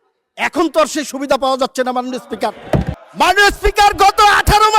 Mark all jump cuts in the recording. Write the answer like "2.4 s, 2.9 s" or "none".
3.0 s